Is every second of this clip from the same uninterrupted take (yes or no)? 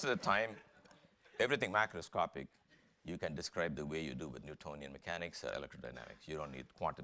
no